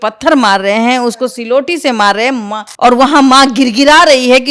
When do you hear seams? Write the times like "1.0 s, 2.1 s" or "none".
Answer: 2.6 s